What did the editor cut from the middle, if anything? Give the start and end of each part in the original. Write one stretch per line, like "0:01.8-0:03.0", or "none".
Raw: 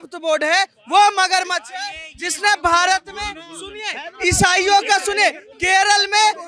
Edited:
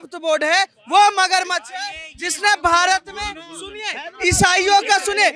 none